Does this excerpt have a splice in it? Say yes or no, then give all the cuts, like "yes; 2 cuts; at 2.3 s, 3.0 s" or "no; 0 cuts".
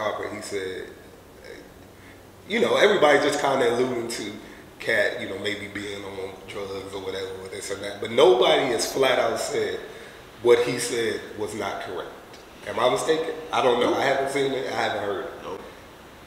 no; 0 cuts